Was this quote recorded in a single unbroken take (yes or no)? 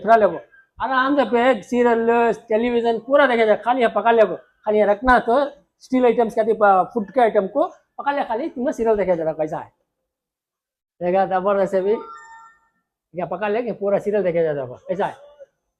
yes